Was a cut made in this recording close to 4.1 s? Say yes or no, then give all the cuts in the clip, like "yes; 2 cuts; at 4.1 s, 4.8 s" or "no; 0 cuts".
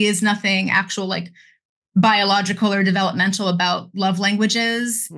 no; 0 cuts